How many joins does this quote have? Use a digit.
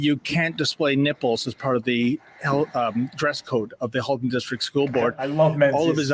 0